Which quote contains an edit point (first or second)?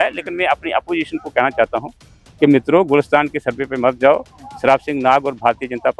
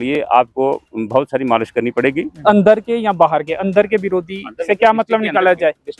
second